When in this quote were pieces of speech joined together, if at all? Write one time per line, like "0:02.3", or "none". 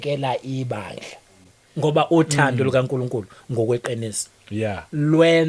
0:01.6

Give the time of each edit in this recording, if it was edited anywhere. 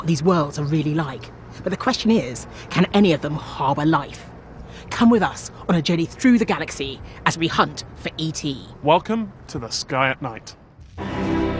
0:08.7

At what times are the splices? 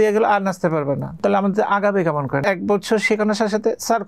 0:01.1
0:02.4

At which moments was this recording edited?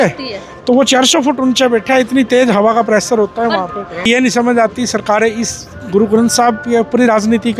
0:04.1

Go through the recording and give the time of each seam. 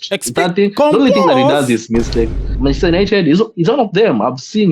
0:02.4

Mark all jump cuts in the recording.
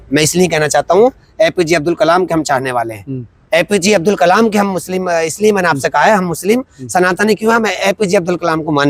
none

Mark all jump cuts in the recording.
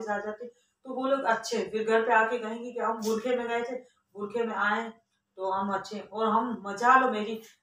none

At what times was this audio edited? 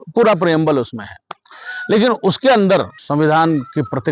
0:03.0

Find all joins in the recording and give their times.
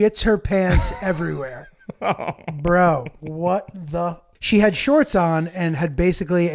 0:04.3

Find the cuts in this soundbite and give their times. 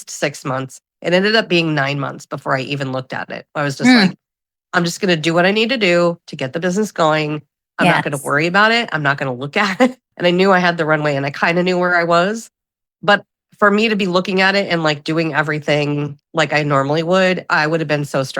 0:10.1
0:17.5

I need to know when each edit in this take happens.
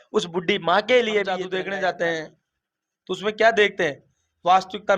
0:01.4

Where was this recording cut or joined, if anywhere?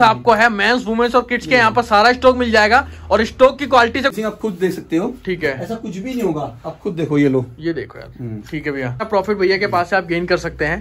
0:04.1
0:09.1

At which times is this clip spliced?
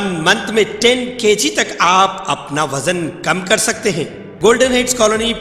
0:04.2

